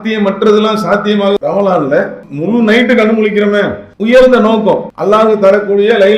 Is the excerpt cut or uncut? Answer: cut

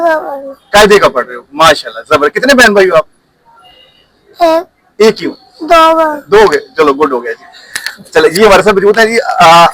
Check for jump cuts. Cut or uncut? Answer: uncut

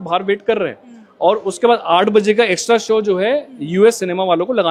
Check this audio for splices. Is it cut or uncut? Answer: uncut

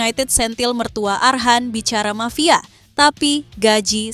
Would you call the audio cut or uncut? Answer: uncut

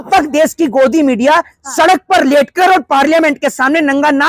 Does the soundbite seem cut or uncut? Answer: uncut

